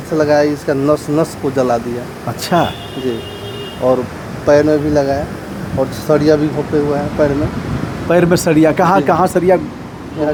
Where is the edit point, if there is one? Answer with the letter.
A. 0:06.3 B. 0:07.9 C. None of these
C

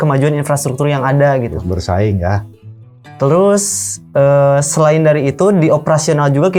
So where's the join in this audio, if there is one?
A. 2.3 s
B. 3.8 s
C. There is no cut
C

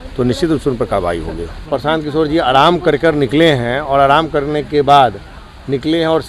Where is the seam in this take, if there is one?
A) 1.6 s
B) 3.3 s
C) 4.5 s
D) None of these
A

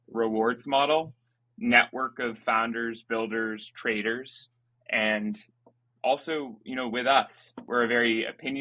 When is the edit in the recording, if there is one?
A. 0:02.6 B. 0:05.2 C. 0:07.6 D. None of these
C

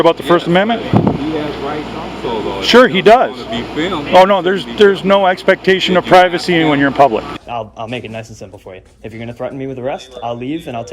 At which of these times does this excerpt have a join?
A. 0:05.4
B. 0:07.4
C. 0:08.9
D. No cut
B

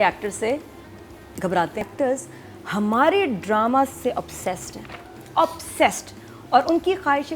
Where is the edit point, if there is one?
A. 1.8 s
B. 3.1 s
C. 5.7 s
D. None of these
A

